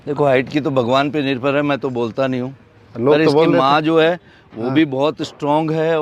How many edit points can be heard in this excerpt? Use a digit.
0